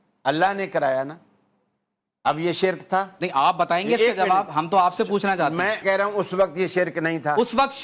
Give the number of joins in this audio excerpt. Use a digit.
1